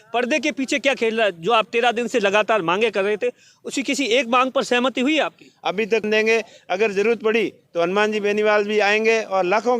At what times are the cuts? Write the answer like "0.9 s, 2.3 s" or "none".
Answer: 6.0 s

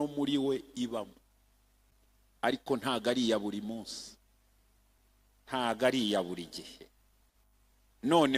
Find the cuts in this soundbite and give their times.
5.0 s

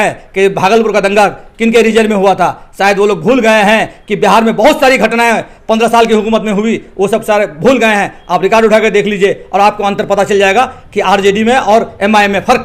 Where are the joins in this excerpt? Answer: none

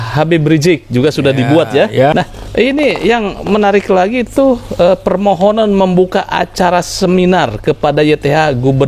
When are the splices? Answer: 2.1 s

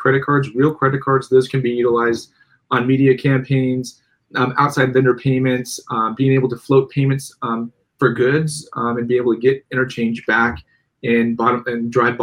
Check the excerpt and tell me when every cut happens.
none

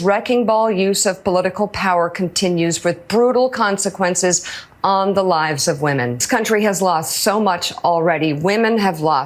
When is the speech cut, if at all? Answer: 6.2 s

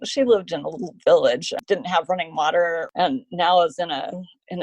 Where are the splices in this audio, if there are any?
1.5 s, 2.9 s

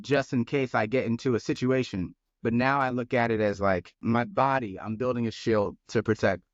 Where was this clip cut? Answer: 4.0 s

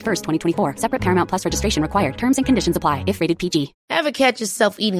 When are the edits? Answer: none

